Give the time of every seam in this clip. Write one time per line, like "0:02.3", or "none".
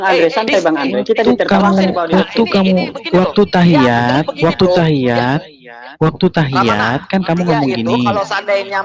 none

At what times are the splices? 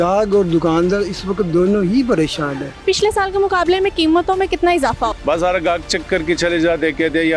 0:02.7
0:05.2

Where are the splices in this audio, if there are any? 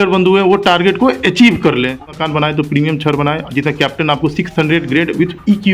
0:02.1

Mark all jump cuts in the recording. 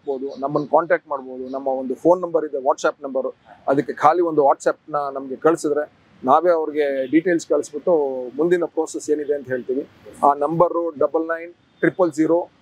none

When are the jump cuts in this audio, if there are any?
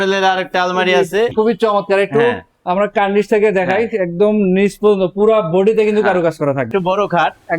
0:01.3
0:06.7

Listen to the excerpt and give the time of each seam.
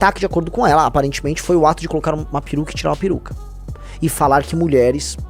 none

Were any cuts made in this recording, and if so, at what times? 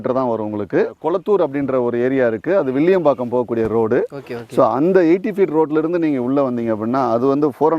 0:01.0

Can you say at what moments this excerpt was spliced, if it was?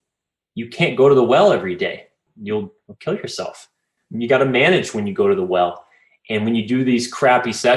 0:02.5

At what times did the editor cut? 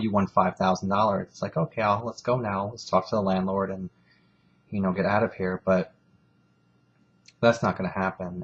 0:02.5

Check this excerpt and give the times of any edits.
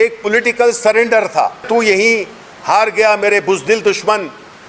0:01.7

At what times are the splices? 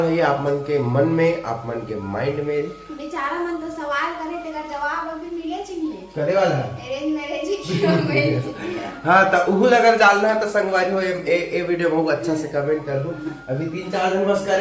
none

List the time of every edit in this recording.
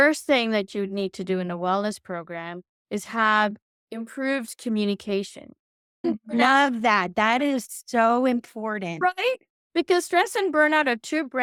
none

